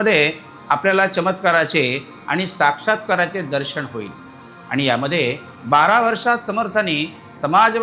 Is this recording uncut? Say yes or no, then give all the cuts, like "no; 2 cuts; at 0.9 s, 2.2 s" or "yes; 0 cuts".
yes; 0 cuts